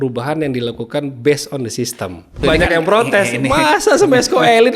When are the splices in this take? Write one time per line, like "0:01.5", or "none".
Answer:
0:02.4